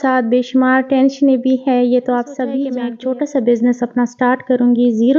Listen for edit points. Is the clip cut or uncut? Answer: cut